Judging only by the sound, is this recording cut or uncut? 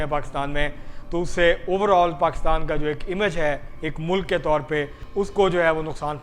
cut